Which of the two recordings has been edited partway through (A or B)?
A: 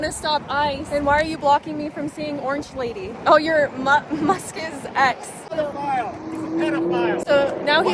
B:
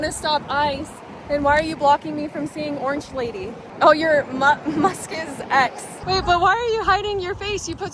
A